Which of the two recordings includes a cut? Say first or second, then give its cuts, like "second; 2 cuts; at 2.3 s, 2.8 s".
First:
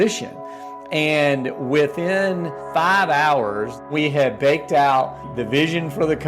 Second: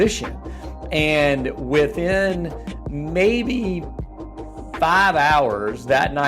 first; 3 cuts; at 2.6 s, 3.8 s, 5.3 s